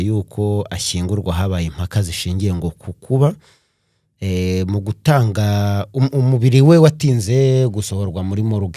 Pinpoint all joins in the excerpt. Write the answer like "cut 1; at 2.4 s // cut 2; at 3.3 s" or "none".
none